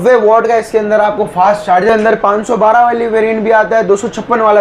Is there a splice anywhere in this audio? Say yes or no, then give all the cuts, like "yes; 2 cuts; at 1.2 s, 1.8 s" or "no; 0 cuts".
yes; 1 cut; at 1.9 s